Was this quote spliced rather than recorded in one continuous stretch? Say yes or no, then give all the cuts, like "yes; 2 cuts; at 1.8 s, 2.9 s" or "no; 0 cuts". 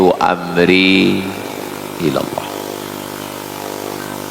no; 0 cuts